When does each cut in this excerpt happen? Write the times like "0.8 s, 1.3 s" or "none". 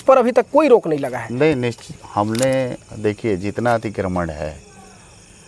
none